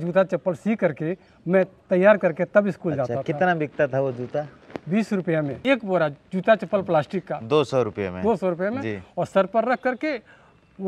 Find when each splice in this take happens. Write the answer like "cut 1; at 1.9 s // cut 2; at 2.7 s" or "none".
cut 1; at 5.6 s